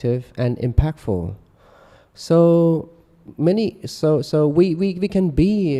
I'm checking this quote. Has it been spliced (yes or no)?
no